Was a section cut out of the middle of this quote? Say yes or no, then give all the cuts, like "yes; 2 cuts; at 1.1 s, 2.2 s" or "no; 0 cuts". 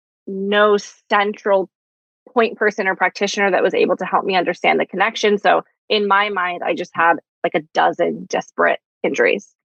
no; 0 cuts